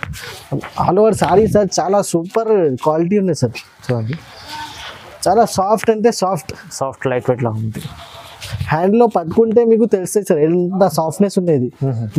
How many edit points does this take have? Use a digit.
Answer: 0